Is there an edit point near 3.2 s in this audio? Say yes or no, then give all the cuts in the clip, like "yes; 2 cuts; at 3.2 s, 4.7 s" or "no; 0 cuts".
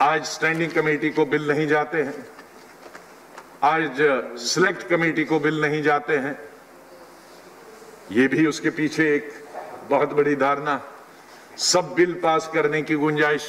no; 0 cuts